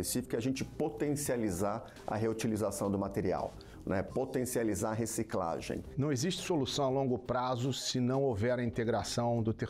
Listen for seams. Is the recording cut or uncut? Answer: cut